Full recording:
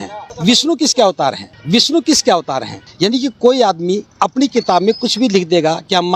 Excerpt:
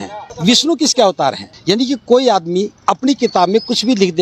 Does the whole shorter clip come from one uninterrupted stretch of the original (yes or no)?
no